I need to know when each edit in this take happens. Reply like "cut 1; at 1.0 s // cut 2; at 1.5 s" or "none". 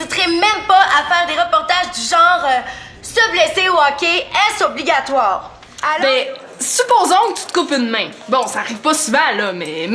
cut 1; at 5.8 s